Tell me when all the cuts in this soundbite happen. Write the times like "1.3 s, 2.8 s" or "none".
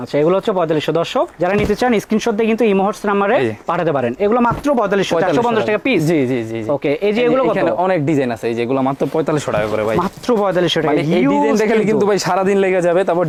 none